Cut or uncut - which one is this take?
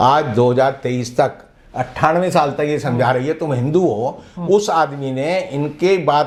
uncut